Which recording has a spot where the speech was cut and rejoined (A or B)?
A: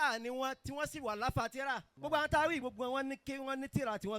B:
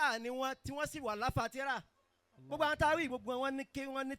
A